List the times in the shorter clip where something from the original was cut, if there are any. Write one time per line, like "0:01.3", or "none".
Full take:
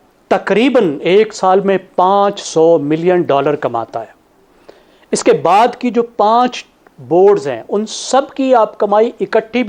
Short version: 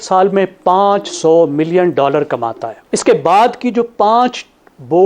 0:02.7